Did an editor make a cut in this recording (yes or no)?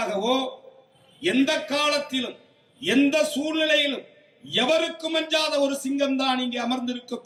no